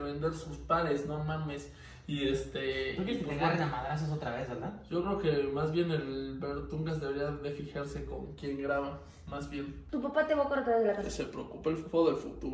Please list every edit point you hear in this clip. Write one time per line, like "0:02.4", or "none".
0:09.9

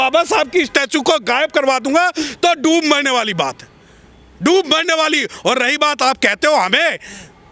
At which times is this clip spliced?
none

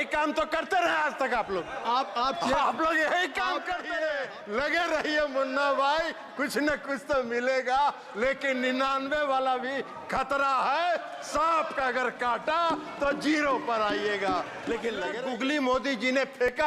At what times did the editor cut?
0:04.0
0:15.1

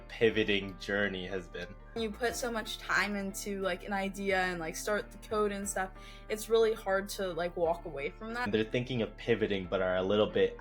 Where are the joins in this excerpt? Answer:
0:02.0
0:08.5

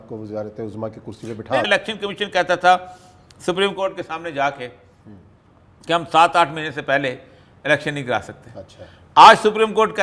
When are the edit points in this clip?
0:01.7

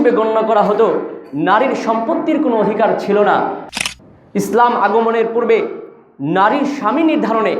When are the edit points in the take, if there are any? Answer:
0:03.7

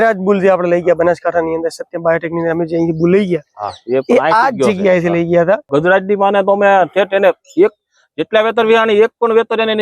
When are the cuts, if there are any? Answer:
0:05.7

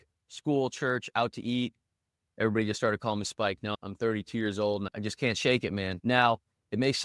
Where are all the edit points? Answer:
0:05.9

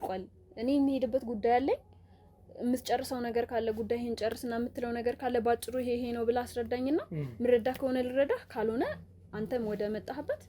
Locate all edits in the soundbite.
none

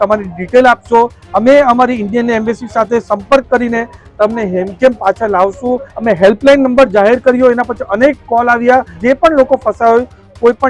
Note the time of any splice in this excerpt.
0:01.2
0:05.9
0:08.9

